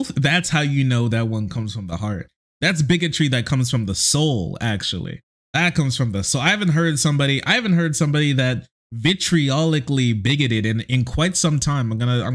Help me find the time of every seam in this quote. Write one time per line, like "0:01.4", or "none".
0:02.5